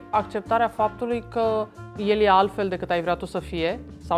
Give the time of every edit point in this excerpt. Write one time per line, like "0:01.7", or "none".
0:01.8